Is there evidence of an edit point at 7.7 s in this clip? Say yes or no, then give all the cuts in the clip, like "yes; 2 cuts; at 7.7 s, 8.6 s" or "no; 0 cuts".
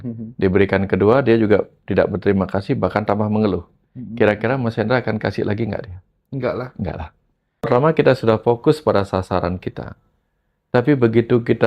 yes; 1 cut; at 7.7 s